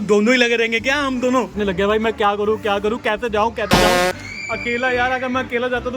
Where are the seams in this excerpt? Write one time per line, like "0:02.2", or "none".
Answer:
0:01.4
0:03.7
0:04.3